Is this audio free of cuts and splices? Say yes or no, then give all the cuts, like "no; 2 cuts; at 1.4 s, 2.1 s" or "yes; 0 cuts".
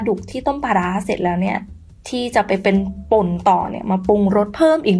yes; 0 cuts